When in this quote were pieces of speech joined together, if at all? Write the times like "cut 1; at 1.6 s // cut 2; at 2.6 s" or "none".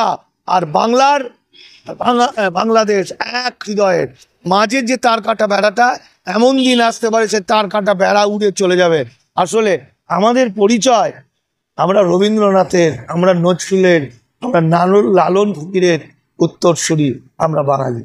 none